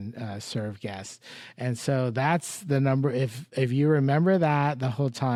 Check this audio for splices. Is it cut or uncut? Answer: uncut